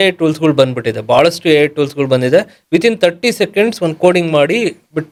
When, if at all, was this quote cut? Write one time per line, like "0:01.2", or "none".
none